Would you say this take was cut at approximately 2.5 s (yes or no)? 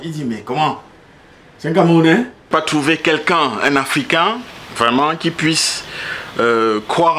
yes